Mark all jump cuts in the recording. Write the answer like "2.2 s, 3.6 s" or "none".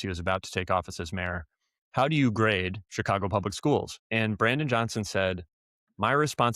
4.0 s